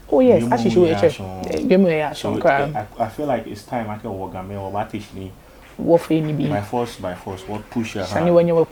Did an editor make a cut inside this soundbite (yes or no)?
no